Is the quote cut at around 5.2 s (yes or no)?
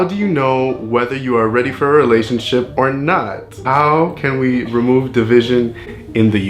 no